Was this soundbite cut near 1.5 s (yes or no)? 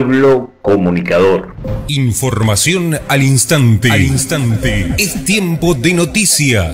yes